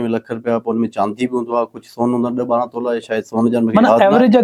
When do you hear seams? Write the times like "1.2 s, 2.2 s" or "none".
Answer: none